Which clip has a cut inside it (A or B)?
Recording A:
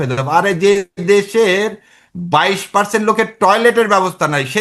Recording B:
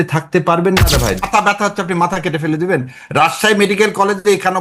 B